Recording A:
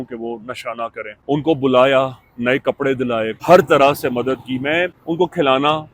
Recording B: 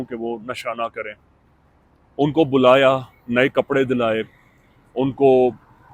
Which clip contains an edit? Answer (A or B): A